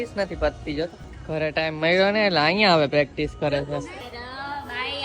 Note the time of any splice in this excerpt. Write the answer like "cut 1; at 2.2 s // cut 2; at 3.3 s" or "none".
cut 1; at 1.1 s // cut 2; at 4.0 s